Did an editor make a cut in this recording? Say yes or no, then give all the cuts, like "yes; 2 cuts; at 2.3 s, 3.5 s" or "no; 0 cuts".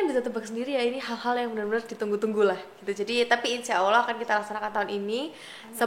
no; 0 cuts